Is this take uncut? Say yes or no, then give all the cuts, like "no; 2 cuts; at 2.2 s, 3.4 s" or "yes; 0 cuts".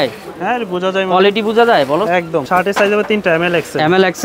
no; 1 cut; at 2.5 s